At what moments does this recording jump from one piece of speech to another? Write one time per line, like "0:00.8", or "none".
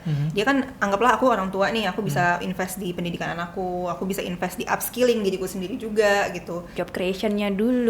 0:06.7

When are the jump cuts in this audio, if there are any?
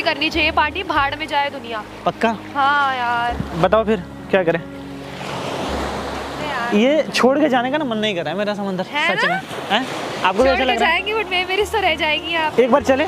none

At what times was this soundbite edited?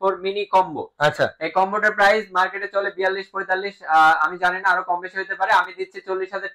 none

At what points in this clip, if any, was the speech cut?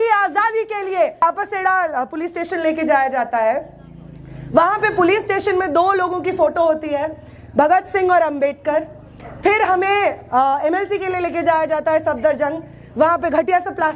0:01.2

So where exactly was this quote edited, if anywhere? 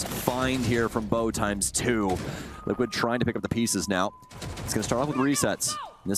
0:02.4

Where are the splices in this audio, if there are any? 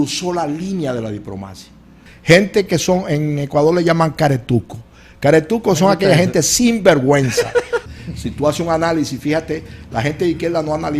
0:02.1
0:07.9

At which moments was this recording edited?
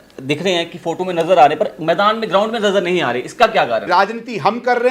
0:03.9

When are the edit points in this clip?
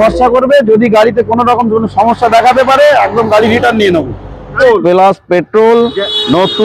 0:04.6

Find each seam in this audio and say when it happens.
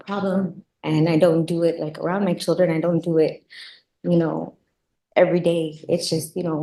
none

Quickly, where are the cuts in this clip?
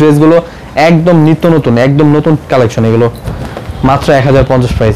none

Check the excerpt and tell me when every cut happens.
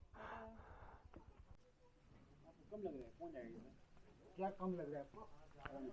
0:01.6

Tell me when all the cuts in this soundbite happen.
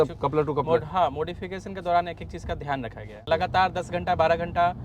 0:03.3

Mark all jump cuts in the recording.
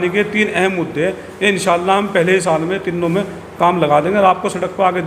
none

